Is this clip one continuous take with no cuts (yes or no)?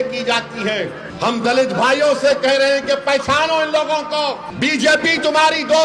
no